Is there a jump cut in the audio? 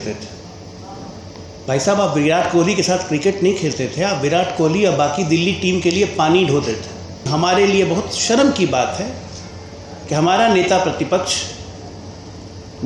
yes; 1 cut; at 7.3 s

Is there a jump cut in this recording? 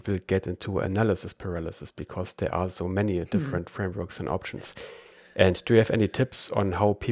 no; 0 cuts

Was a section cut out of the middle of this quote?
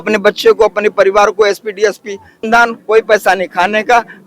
yes; 1 cut; at 2.4 s

